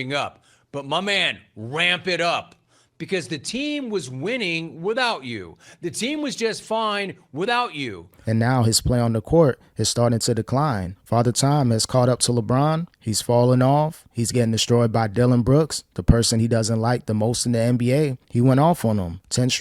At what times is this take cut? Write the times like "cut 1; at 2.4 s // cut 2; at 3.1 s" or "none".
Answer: cut 1; at 8.1 s